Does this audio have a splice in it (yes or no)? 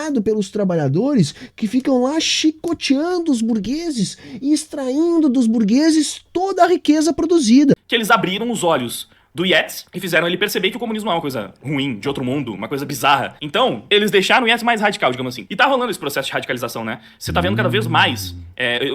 yes